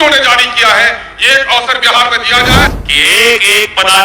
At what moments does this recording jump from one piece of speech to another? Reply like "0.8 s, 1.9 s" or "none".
2.7 s